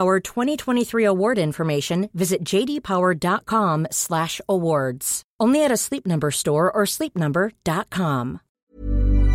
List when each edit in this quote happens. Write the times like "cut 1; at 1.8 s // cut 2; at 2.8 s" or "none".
cut 1; at 8.4 s